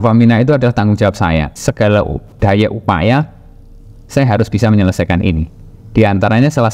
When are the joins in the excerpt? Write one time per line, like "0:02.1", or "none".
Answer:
0:01.6